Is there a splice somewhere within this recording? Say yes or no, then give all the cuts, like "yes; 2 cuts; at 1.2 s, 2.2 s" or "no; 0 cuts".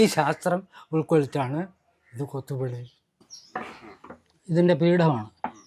yes; 1 cut; at 3.4 s